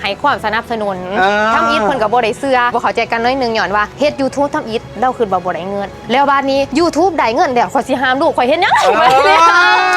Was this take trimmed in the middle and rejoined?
yes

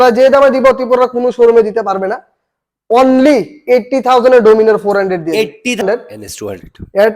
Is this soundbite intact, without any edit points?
no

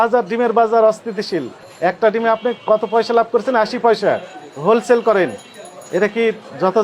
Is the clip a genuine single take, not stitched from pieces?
no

